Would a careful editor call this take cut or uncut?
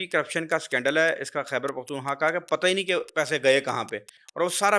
uncut